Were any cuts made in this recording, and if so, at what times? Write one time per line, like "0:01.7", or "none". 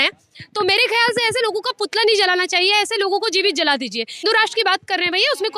0:04.2